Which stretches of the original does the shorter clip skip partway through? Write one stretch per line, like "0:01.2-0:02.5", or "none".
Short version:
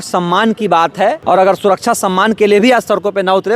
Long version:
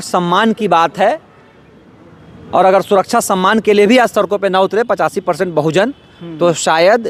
0:01.2-0:02.5

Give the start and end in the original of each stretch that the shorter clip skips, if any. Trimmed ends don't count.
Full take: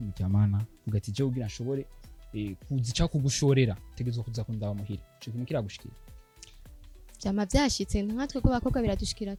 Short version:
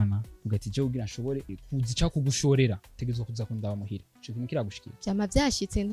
0:02.0-0:02.6
0:05.8-0:07.0

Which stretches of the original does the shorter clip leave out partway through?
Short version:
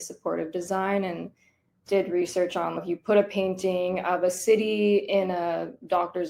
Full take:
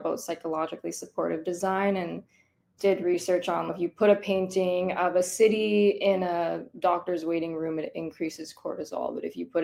none

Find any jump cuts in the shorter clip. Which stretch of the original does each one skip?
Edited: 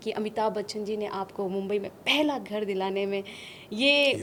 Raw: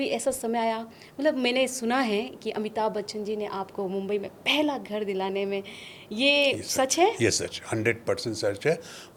none

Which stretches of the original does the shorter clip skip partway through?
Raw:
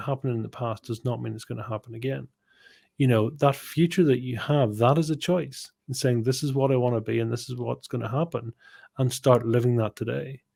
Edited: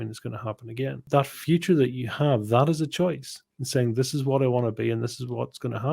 0:02.3-0:03.3

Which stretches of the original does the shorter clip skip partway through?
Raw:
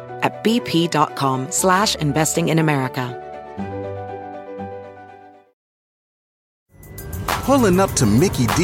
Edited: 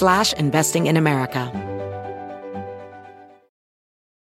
0:03.1-0:03.5

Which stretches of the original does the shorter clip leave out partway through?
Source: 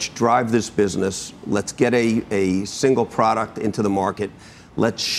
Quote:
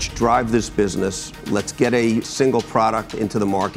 0:02.3-0:02.7

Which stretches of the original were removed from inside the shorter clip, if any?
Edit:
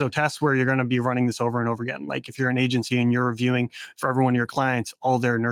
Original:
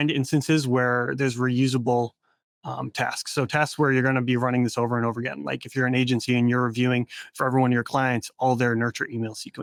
none

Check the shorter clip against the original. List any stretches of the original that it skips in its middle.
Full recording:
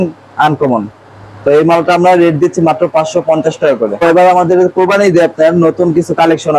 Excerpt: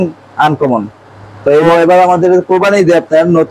0:01.7-0:03.9

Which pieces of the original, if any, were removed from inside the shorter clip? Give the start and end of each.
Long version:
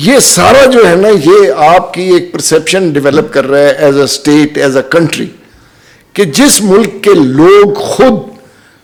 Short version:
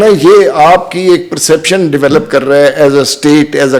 none

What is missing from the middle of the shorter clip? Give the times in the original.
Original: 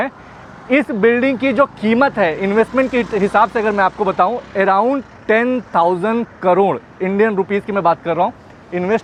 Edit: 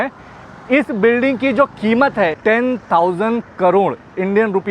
0:02.4-0:05.2

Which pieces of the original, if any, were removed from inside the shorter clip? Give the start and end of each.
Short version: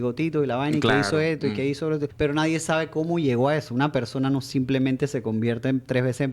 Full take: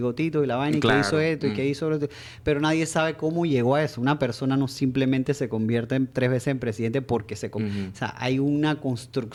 0:02.1-0:02.4

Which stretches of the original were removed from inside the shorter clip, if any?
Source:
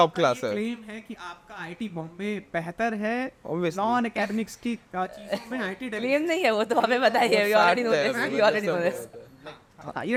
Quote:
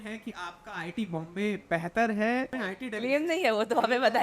0:03.3-0:05.5

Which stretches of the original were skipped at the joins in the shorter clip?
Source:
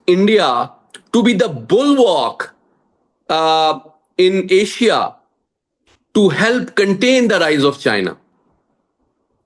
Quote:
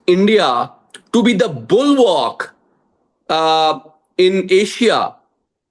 none

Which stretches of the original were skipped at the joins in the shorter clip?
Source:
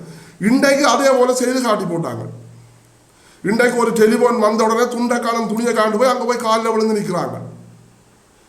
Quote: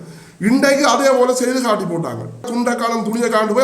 0:02.5-0:04.9

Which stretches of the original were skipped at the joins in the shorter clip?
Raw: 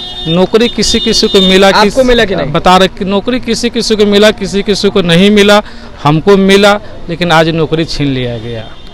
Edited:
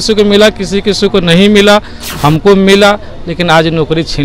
none

